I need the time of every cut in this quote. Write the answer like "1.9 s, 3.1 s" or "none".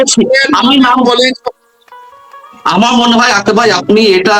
none